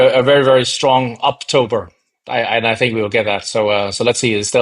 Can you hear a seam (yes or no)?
no